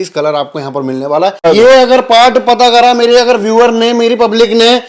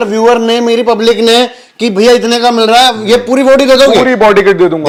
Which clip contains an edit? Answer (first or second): first